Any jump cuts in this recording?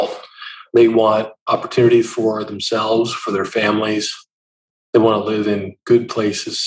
no; 0 cuts

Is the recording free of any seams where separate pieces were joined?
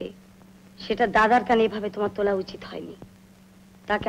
yes; 0 cuts

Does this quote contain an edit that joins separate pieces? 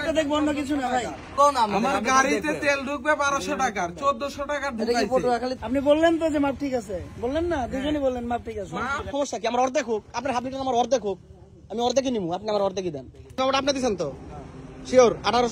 yes; 4 cuts; at 1.3 s, 5.6 s, 9.1 s, 13.4 s

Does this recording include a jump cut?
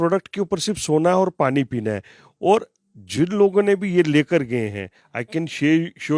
no; 0 cuts

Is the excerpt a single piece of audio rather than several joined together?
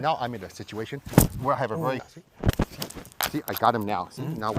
no; 1 cut; at 2.0 s

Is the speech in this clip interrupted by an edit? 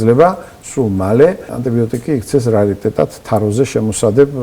yes; 1 cut; at 1.5 s

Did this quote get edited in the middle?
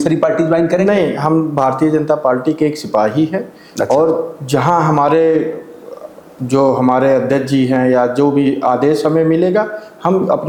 no; 0 cuts

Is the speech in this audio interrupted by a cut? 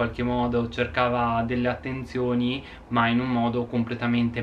no; 0 cuts

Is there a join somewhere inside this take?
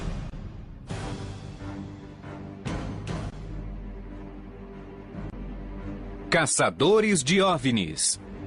yes; 1 cut; at 2.0 s

